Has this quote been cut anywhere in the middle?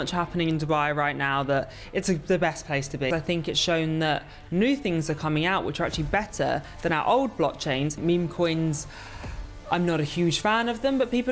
yes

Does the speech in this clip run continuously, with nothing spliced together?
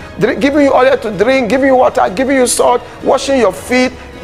yes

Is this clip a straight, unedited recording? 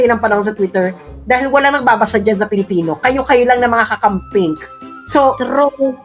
yes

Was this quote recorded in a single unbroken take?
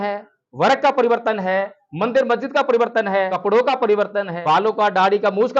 no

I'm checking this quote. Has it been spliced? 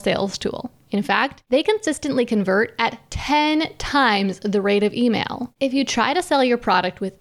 yes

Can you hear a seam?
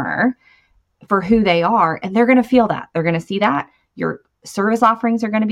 no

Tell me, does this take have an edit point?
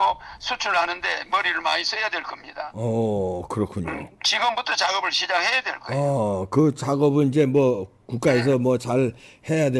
no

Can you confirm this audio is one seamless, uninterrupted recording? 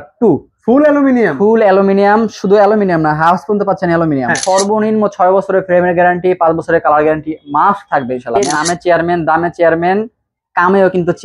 no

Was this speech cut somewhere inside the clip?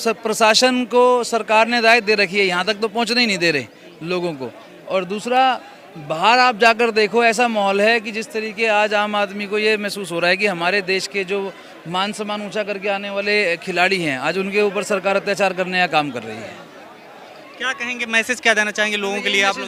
no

